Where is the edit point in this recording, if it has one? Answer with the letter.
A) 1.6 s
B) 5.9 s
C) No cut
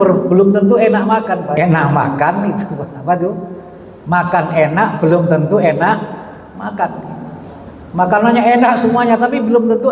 A